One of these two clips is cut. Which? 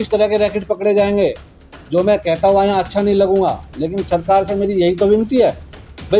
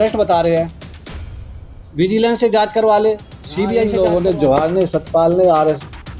second; 1 cut; at 3.9 s

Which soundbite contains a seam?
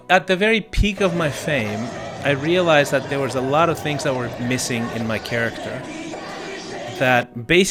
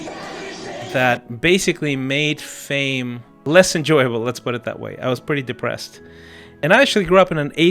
second; 2 cuts; at 3.3 s, 6.5 s

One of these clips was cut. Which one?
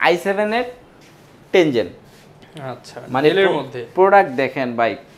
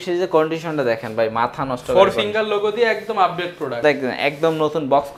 second; 1 cut; at 3.8 s

